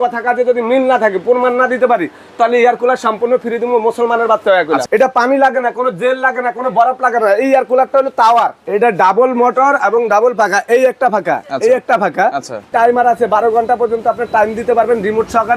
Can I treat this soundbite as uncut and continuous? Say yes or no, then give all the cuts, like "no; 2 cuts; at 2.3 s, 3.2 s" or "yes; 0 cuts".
no; 3 cuts; at 4.8 s, 8.6 s, 12.7 s